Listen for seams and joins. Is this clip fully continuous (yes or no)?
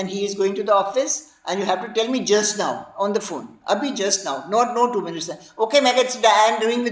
yes